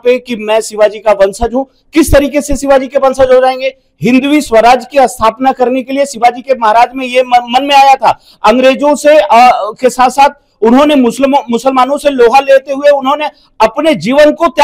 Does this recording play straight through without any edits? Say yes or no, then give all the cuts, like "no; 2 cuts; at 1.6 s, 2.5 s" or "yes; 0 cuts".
yes; 0 cuts